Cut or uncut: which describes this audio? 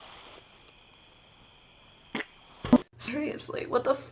cut